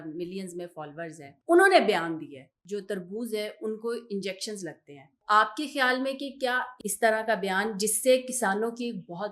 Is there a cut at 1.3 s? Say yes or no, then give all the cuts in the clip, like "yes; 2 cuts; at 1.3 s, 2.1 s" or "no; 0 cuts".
yes; 4 cuts; at 1.3 s, 2.5 s, 5.2 s, 6.7 s